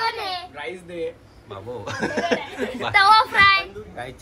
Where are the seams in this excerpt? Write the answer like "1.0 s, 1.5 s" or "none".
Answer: none

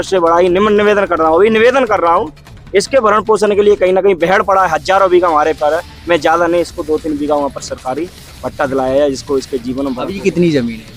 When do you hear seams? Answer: none

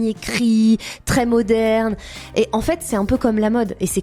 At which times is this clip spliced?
none

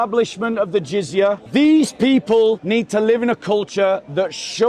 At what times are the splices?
1.4 s, 2.6 s

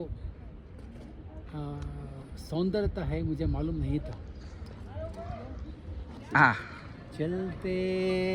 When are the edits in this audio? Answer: 6.1 s

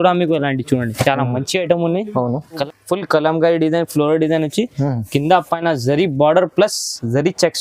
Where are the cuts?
2.6 s

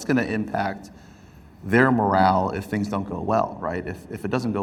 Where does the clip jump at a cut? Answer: none

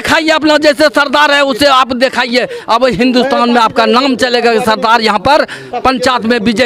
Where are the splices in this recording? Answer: none

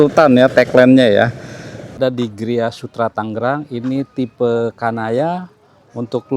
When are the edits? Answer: 1.9 s

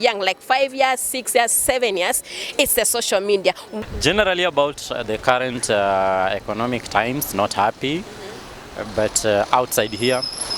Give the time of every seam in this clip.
3.7 s

